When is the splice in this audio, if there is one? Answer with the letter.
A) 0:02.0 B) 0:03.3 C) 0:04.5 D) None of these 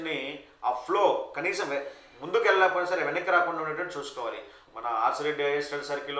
C